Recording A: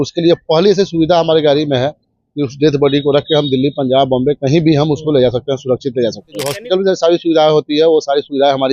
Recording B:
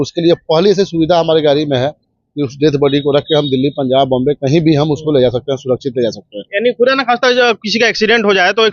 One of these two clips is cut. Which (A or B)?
A